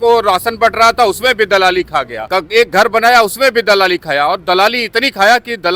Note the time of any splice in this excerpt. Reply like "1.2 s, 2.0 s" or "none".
2.2 s

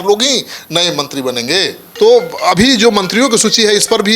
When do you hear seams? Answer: 1.8 s

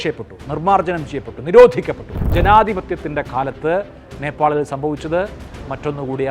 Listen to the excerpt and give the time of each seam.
2.1 s

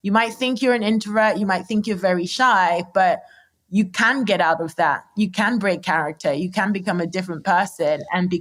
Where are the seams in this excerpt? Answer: none

